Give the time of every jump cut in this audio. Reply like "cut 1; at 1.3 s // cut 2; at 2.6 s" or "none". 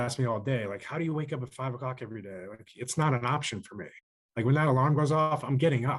none